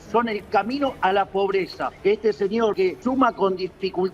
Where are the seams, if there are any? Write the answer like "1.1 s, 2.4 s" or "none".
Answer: 1.9 s, 2.8 s